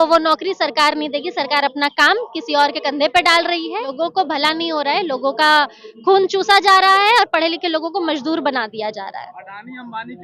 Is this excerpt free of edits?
no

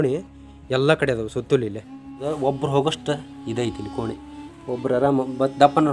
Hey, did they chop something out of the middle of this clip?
no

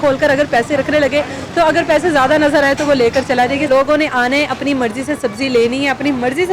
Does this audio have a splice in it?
yes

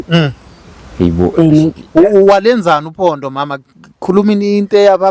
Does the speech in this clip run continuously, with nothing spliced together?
yes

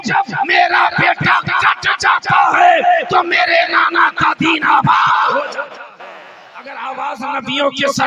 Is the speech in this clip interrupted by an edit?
yes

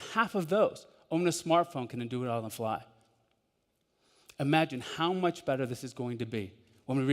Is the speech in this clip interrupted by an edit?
no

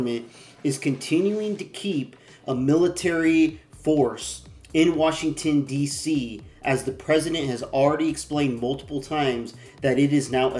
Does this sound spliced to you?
no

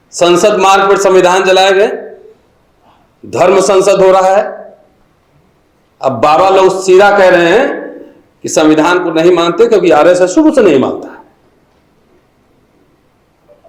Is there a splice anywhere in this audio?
no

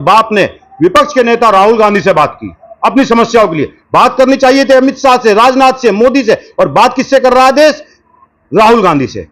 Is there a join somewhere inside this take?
no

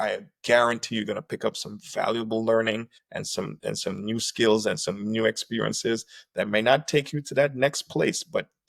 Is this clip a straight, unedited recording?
yes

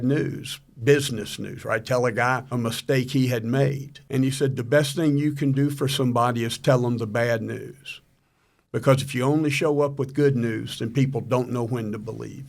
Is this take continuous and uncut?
no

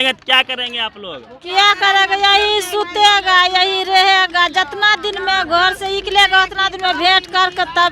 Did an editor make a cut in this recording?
no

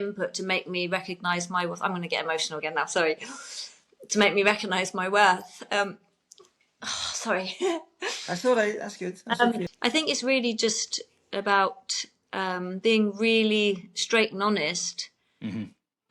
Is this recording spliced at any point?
yes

